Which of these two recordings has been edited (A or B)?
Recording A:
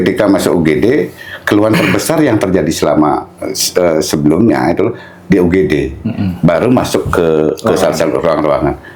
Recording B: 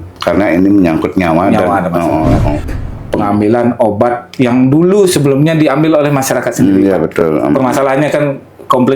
B